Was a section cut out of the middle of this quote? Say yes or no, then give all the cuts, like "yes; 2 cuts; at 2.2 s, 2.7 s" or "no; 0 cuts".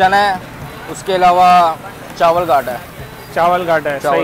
no; 0 cuts